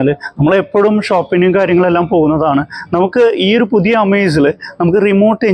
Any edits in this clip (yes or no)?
no